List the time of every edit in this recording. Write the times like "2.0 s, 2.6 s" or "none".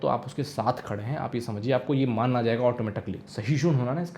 3.2 s